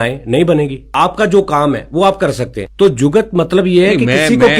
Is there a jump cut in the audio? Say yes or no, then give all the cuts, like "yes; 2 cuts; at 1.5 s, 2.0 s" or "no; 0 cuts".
yes; 2 cuts; at 0.8 s, 2.6 s